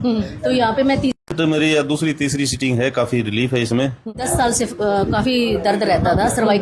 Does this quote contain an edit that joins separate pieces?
yes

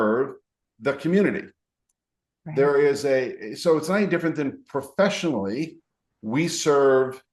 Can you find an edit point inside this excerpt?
no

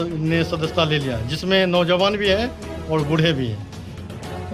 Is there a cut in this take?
no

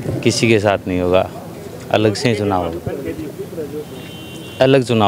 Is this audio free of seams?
yes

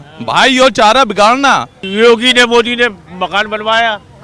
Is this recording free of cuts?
no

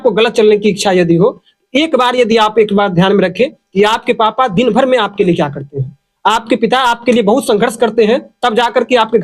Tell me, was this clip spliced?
no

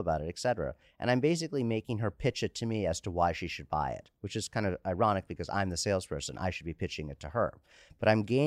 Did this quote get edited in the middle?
no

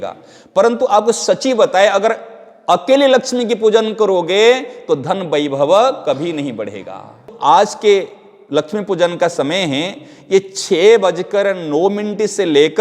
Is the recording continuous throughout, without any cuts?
no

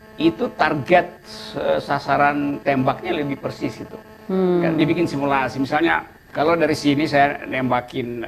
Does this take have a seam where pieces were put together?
yes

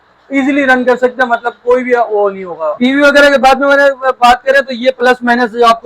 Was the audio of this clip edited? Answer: yes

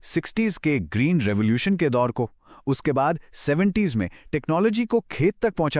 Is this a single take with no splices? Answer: yes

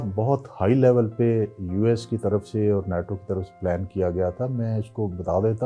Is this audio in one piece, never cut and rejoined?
yes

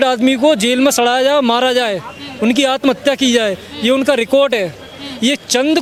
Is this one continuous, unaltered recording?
yes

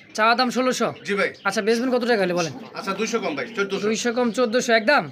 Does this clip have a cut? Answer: no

